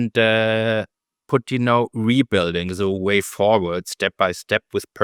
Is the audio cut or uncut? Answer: uncut